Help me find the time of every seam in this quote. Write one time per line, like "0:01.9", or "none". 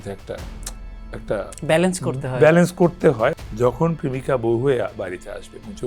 0:03.3